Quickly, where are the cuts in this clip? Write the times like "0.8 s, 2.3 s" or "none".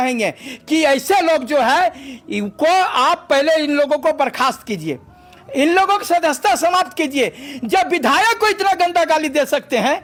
none